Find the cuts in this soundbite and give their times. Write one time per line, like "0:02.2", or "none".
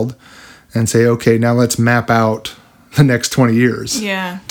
none